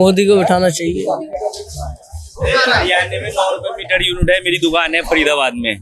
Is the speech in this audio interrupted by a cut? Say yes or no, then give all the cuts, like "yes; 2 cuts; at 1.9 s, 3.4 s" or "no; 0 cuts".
no; 0 cuts